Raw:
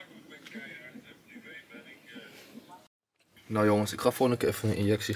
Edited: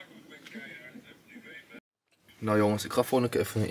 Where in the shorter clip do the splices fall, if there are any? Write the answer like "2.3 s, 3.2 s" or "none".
1.8 s